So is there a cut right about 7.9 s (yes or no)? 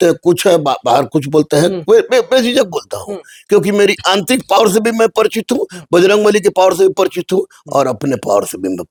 no